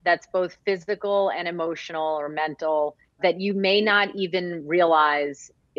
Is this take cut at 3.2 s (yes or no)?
yes